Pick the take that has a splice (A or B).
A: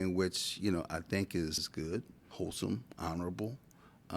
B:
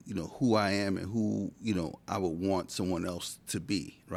A